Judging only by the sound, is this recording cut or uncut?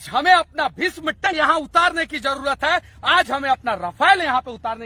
cut